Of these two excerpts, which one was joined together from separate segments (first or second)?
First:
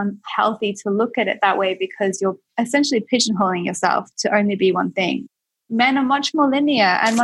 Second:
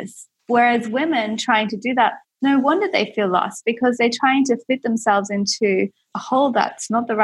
first